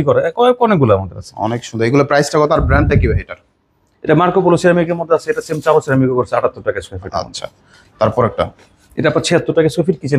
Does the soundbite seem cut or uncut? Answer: uncut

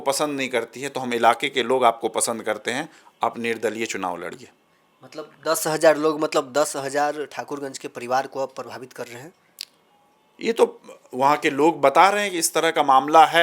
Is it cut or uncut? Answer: uncut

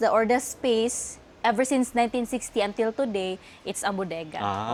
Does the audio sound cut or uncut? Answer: uncut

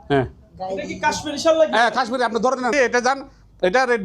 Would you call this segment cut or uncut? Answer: cut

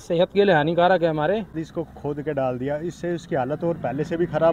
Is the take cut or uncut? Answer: cut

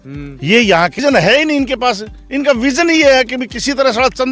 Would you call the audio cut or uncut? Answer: cut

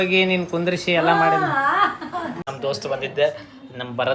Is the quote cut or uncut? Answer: cut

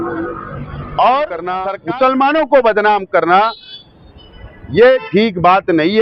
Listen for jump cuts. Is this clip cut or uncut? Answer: cut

